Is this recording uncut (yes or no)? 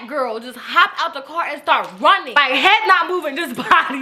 no